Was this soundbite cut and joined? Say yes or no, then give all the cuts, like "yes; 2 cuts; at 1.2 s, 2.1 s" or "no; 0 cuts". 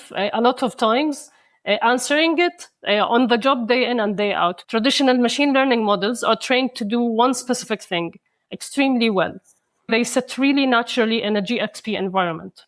yes; 2 cuts; at 4.6 s, 9.9 s